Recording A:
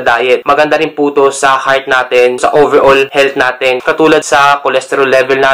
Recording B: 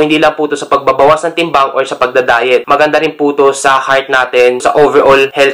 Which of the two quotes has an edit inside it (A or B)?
A